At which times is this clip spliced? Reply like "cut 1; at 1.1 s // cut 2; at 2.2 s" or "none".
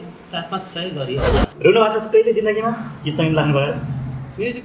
cut 1; at 1.5 s